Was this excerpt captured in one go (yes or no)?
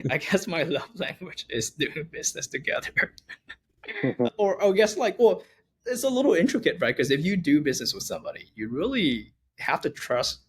yes